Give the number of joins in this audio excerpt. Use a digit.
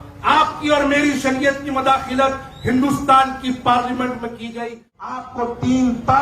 1